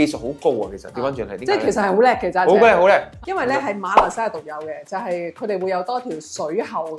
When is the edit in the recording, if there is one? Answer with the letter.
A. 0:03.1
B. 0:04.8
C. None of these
A